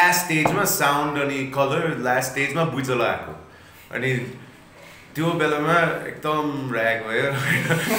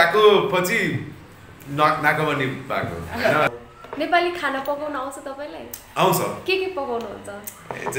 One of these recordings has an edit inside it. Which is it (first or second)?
second